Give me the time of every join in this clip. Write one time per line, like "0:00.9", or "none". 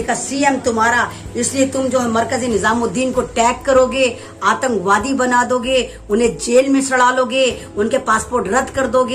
none